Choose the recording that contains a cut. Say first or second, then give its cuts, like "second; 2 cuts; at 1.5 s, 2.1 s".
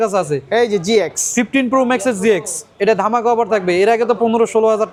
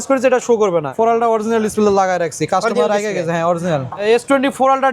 second; 2 cuts; at 0.9 s, 4.0 s